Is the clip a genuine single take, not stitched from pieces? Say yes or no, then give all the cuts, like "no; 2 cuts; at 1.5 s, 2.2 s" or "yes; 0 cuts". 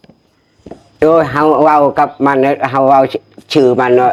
yes; 0 cuts